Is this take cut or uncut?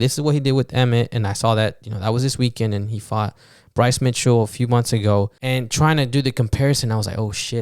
cut